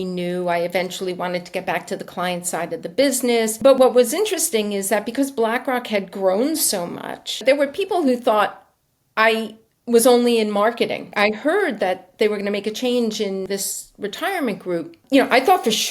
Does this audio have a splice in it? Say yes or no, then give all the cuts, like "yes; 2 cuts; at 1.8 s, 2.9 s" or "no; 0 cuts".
yes; 5 cuts; at 3.7 s, 7.4 s, 11.1 s, 13.4 s, 15.0 s